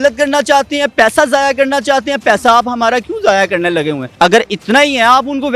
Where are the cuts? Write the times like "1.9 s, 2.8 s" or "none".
4.0 s